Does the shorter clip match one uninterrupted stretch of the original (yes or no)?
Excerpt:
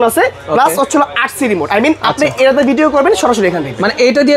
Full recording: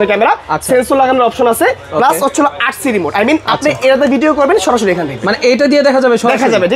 yes